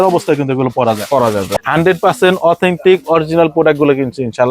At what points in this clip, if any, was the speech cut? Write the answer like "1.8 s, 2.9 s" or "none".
1.5 s